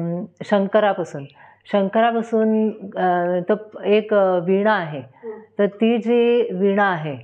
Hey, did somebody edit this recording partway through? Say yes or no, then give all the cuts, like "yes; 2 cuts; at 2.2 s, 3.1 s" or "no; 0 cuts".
no; 0 cuts